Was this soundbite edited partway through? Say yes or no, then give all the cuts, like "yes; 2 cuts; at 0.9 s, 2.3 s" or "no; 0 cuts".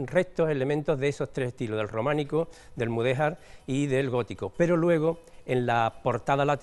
no; 0 cuts